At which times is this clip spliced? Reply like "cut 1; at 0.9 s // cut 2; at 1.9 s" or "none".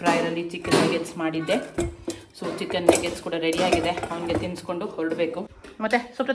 none

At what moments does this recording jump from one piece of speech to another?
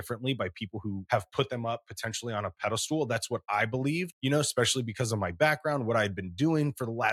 cut 1; at 1.0 s // cut 2; at 4.1 s

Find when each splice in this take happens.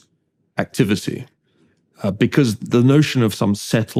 none

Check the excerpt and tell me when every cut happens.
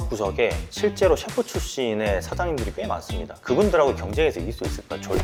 none

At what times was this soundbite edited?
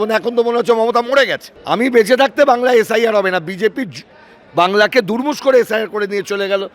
cut 1; at 1.5 s

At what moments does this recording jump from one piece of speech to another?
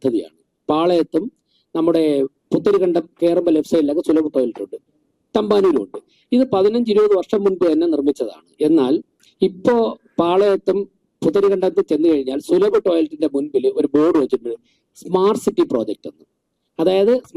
none

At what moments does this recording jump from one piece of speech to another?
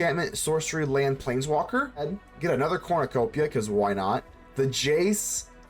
cut 1; at 2.1 s

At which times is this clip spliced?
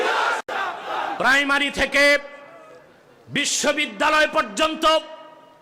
cut 1; at 1.1 s

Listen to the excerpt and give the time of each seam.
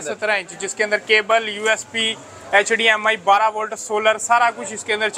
none

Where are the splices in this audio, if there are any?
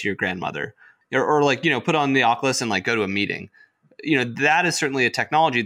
cut 1; at 0.9 s

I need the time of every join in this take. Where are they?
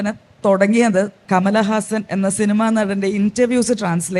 cut 1; at 1.2 s

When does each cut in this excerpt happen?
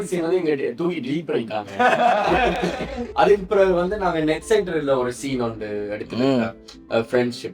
cut 1; at 3.0 s

